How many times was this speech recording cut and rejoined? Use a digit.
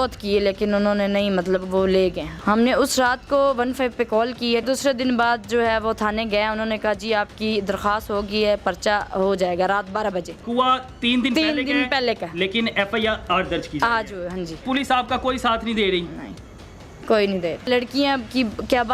5